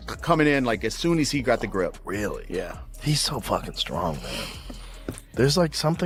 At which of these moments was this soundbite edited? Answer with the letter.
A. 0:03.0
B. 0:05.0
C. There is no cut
C